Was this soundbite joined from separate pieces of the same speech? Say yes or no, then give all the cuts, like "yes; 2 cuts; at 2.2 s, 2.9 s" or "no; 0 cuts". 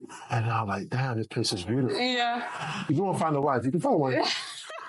yes; 1 cut; at 2.9 s